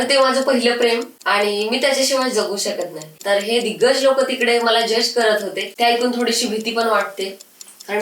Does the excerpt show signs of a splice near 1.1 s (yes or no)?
yes